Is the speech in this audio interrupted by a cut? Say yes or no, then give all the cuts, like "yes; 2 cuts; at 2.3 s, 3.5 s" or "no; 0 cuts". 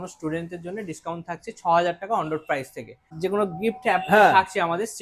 yes; 1 cut; at 3.2 s